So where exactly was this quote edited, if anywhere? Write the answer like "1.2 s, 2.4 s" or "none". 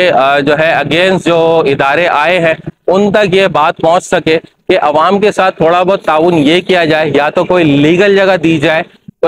none

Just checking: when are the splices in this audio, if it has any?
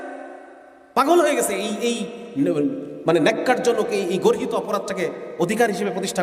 none

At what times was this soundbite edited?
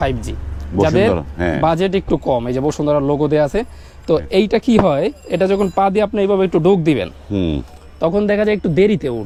none

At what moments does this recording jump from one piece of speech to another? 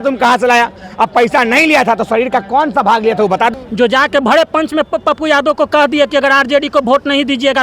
3.5 s

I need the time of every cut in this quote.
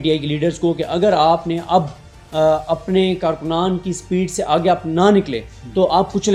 none

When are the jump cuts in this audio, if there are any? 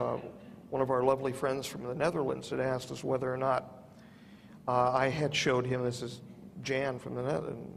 none

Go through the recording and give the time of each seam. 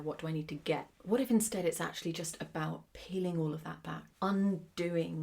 0.9 s, 2.9 s, 4.1 s

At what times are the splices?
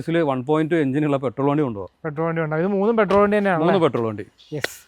none

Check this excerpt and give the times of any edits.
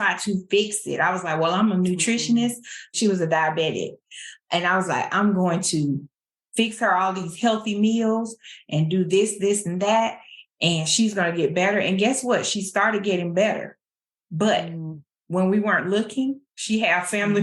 2.9 s

